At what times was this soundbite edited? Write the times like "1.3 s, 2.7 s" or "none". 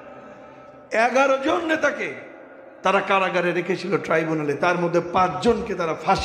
none